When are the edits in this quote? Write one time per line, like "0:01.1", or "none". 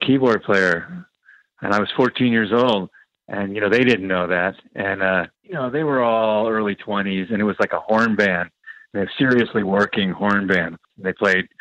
0:05.4
0:10.8

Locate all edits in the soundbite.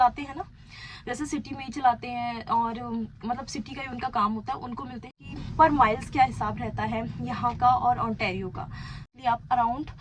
0:05.0
0:09.1

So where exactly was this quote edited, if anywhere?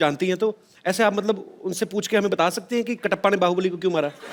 none

